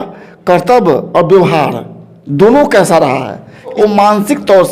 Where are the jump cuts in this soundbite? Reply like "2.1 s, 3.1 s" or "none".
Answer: 3.7 s